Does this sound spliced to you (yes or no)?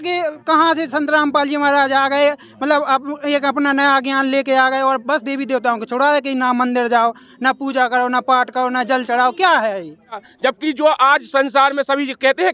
yes